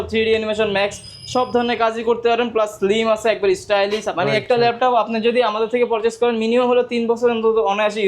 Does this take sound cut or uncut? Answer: cut